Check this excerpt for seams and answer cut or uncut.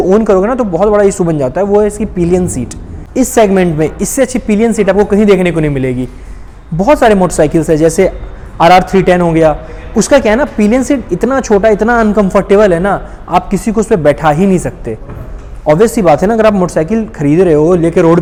uncut